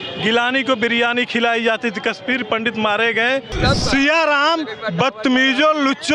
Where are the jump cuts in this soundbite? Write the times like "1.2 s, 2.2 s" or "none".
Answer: 3.5 s